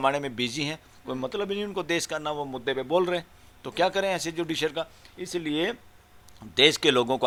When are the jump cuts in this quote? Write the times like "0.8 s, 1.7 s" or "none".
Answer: none